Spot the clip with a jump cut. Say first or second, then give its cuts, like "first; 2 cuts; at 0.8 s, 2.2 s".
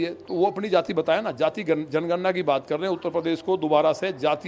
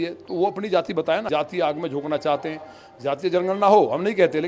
second; 1 cut; at 1.3 s